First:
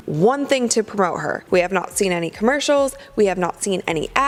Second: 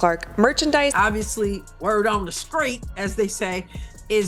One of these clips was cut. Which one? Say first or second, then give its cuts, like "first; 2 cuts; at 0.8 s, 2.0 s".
second; 1 cut; at 0.9 s